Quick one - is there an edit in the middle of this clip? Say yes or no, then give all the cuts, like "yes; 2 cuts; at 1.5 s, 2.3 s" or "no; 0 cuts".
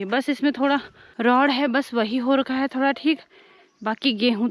yes; 1 cut; at 1.0 s